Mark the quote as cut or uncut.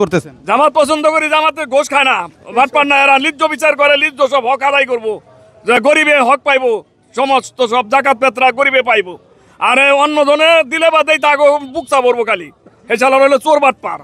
uncut